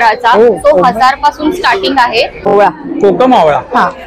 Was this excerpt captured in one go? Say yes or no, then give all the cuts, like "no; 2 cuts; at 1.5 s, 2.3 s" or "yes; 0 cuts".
no; 1 cut; at 2.5 s